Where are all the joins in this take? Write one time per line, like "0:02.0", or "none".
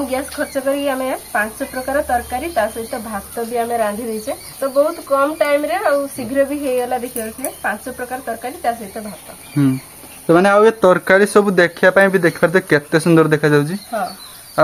none